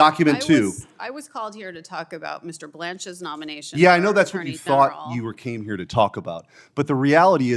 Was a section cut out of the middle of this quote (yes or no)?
no